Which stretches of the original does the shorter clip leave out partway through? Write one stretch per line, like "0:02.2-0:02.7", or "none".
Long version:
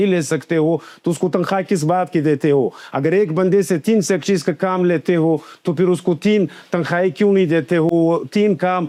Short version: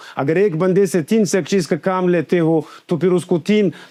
none